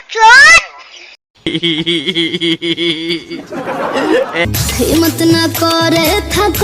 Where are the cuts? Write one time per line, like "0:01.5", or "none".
none